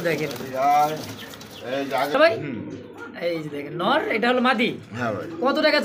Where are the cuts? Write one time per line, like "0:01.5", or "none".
0:02.1